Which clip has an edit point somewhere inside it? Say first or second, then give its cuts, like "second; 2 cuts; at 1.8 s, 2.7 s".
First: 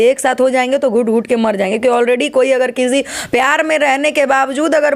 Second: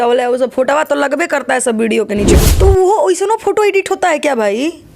second; 1 cut; at 2.5 s